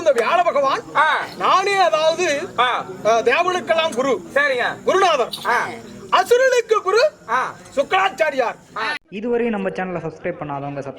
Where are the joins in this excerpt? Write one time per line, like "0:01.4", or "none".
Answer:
0:08.9

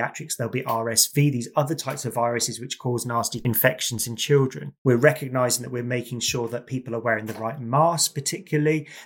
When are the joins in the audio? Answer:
0:03.3
0:04.7

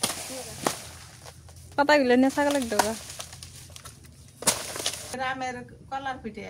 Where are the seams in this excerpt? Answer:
0:05.1

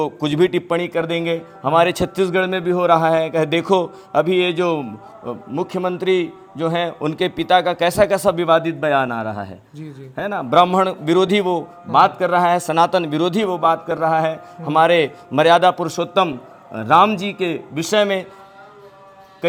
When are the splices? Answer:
none

